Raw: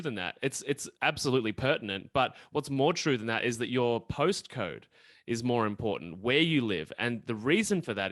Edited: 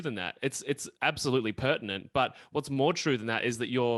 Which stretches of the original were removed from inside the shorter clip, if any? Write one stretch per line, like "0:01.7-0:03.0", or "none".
none